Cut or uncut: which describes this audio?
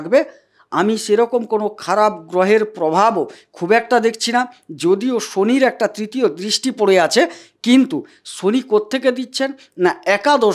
uncut